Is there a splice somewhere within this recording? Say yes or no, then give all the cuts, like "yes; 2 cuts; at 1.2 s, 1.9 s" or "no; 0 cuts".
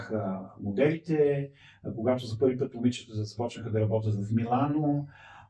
no; 0 cuts